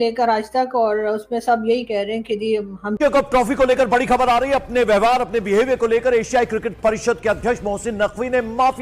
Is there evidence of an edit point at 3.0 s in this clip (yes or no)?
yes